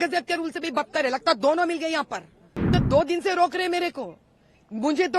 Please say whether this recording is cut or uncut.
cut